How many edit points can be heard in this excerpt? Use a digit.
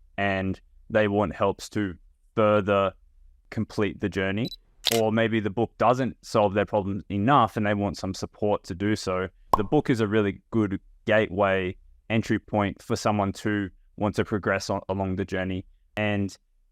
4